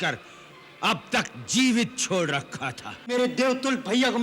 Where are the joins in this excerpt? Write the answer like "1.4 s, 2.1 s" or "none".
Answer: 3.1 s